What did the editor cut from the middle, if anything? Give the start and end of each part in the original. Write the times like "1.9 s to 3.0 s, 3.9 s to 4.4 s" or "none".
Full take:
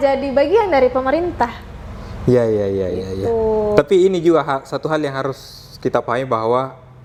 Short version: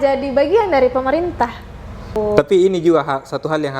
2.2 s to 3.6 s